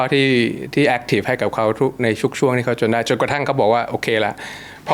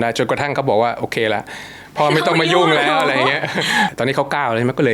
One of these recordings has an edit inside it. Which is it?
second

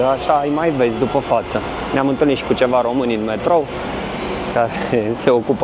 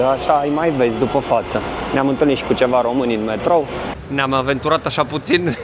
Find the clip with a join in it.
second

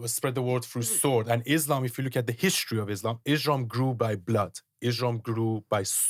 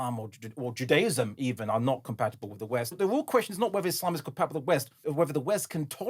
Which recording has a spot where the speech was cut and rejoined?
second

